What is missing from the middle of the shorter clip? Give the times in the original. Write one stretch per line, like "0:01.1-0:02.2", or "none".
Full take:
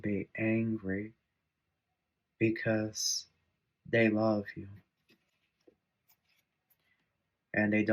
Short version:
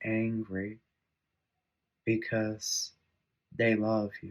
none